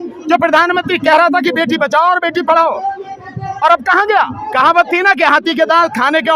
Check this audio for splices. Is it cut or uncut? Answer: cut